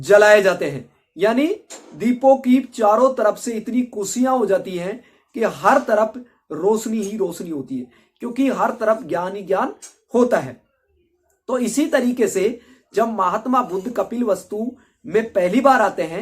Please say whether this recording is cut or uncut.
uncut